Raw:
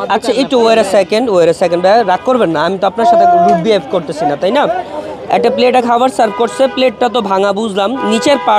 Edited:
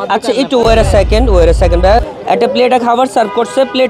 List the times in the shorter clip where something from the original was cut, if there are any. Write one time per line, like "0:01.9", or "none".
0:01.8